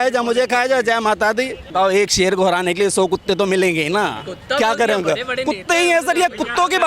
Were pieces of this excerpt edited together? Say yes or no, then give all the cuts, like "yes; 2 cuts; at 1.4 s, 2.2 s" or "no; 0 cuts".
yes; 1 cut; at 1.6 s